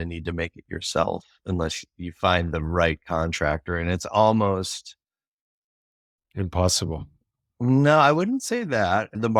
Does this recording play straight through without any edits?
yes; 0 cuts

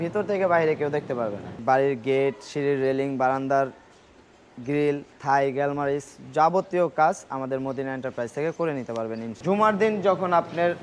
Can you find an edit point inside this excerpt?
yes; 3 cuts; at 1.6 s, 5.1 s, 9.3 s

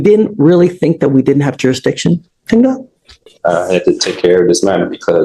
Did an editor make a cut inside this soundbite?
no; 0 cuts

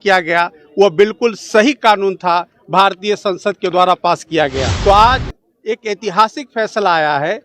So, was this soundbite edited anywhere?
yes; 1 cut; at 4.7 s

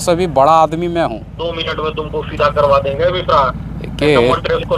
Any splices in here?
yes; 1 cut; at 1.5 s

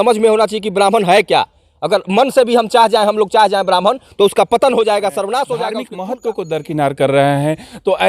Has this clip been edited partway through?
yes; 1 cut; at 5.9 s

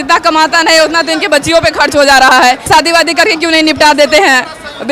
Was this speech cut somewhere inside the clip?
yes; 1 cut; at 2.7 s

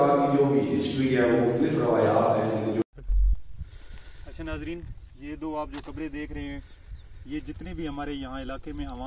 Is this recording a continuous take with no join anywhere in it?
no; 1 cut; at 2.8 s

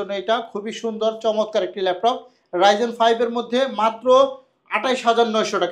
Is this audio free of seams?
yes; 0 cuts

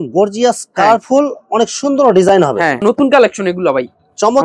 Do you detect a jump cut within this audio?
yes; 1 cut; at 2.8 s

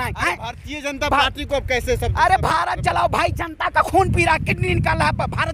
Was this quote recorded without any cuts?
yes; 0 cuts

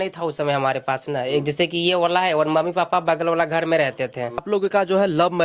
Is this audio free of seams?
no; 1 cut; at 4.4 s

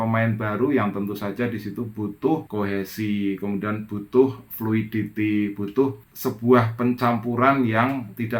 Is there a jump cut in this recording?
no; 0 cuts

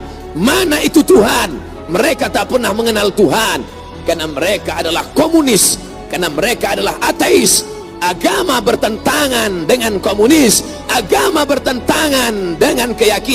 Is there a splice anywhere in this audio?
yes; 1 cut; at 7.8 s

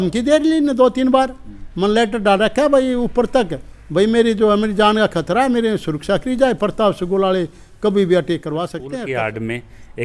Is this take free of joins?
no; 1 cut; at 8.8 s

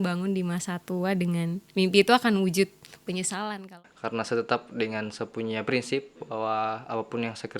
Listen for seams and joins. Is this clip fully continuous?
no; 1 cut; at 3.6 s

